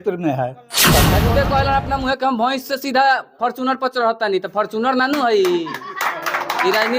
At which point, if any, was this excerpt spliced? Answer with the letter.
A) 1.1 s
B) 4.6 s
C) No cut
A